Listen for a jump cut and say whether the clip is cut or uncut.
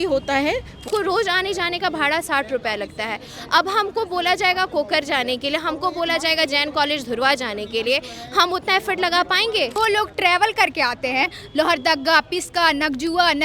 cut